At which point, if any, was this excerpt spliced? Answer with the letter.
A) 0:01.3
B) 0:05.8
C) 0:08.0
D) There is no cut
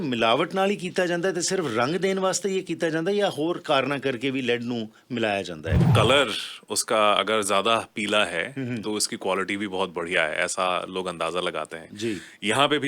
B